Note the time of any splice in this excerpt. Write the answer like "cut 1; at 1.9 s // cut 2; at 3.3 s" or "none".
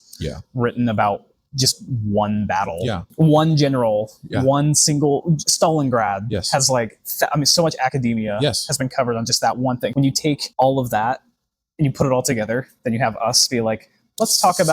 cut 1; at 3.1 s // cut 2; at 9.9 s